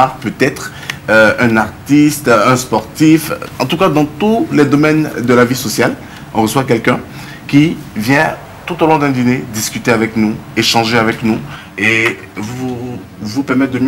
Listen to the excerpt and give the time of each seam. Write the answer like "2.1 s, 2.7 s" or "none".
none